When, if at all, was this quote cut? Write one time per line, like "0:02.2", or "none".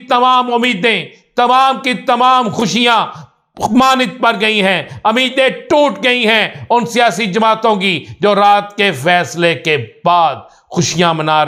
none